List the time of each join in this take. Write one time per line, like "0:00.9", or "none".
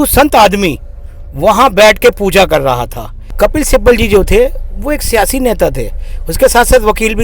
0:03.3